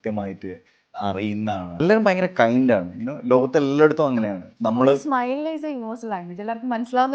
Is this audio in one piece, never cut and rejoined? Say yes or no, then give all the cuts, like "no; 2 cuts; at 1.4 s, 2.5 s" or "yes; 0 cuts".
no; 1 cut; at 1.7 s